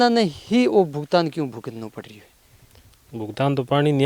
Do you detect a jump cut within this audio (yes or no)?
no